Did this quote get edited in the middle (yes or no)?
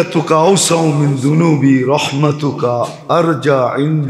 no